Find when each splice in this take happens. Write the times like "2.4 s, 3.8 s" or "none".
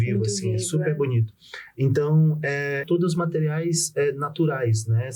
2.8 s